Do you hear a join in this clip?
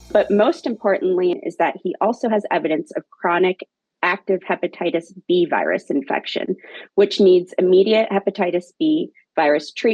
yes; 1 cut; at 1.4 s

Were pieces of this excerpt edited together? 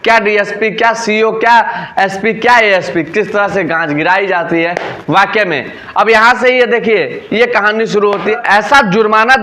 yes; 1 cut; at 8.4 s

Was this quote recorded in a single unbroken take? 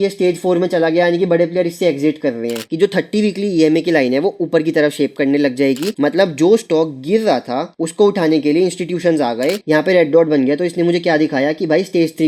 no; 3 cuts; at 2.7 s, 5.9 s, 9.6 s

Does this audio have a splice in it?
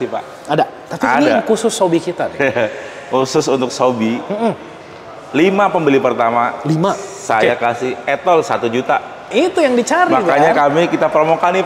yes; 1 cut; at 9.3 s

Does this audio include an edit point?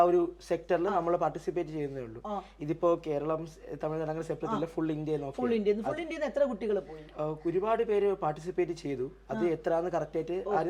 no; 0 cuts

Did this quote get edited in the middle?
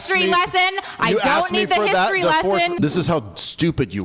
yes; 1 cut; at 2.7 s

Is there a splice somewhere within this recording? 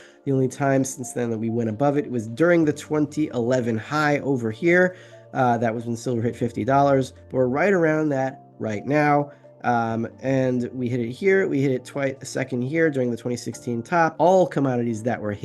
yes; 1 cut; at 14.1 s

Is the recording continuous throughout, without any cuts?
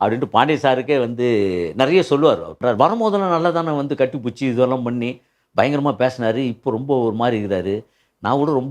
no; 1 cut; at 2.6 s

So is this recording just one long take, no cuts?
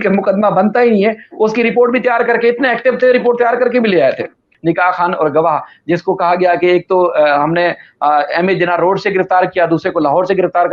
no; 1 cut; at 4.5 s

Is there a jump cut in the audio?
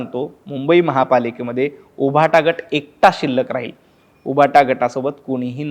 no; 0 cuts

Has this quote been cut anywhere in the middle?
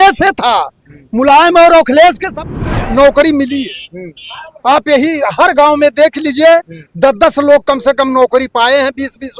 yes; 1 cut; at 2.3 s

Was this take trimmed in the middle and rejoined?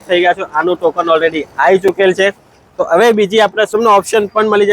yes; 1 cut; at 3.7 s

